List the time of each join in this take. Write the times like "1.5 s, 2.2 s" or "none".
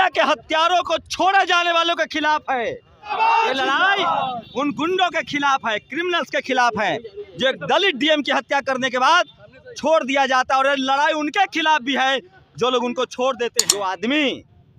3.1 s, 13.7 s